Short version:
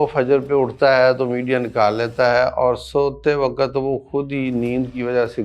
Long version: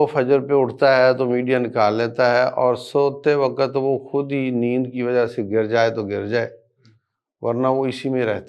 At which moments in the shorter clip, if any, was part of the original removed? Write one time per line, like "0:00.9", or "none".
none